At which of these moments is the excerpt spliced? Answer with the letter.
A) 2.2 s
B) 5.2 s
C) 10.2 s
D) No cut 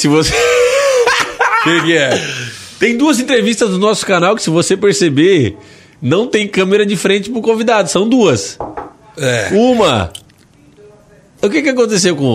D